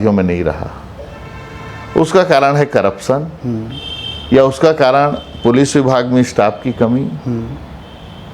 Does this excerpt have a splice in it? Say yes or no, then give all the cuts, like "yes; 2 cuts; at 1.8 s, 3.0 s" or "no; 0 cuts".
no; 0 cuts